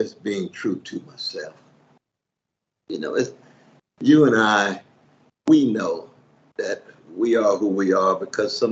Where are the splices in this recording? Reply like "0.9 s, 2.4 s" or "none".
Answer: none